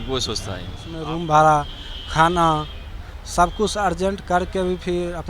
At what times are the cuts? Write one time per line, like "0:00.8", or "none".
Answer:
0:00.9